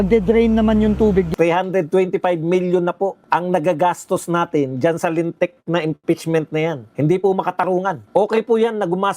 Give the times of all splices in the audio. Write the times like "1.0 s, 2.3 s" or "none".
1.3 s, 3.2 s, 6.8 s, 8.0 s